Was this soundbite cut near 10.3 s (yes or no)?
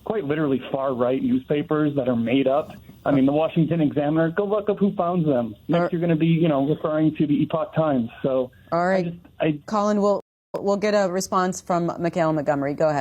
yes